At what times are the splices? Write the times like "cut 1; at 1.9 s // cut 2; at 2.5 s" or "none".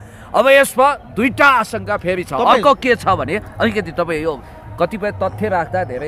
none